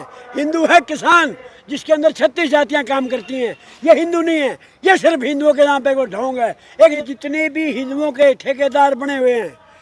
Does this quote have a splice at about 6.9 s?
yes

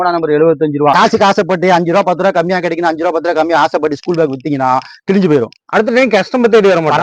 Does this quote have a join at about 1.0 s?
yes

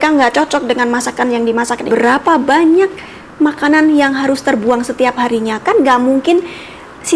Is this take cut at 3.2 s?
no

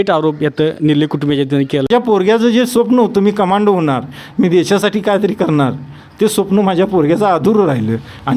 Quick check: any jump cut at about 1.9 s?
yes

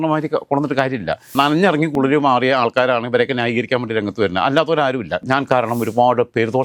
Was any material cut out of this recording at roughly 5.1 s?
yes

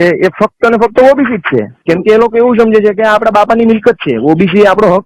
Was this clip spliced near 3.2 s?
no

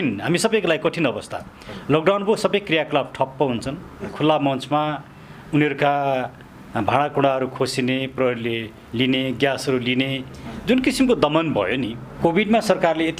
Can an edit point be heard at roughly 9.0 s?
no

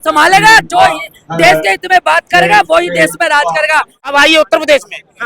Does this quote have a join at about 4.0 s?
yes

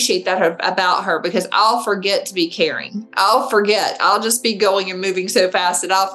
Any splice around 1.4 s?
no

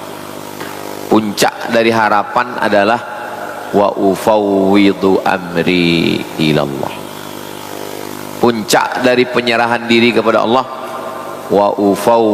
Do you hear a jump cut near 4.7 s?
no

